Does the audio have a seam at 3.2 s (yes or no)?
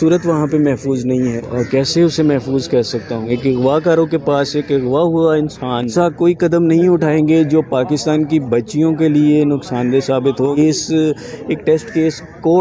yes